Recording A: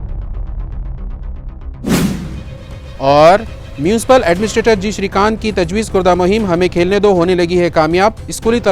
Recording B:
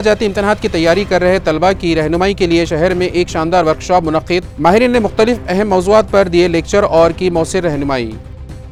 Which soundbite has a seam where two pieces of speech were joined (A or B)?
A